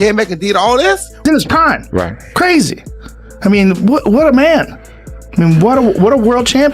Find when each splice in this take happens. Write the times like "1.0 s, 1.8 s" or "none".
1.2 s